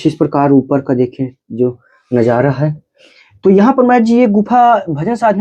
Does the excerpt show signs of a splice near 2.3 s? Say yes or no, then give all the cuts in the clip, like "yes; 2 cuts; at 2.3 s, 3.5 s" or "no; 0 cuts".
no; 0 cuts